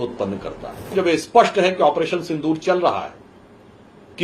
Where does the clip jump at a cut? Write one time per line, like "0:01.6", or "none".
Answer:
0:00.9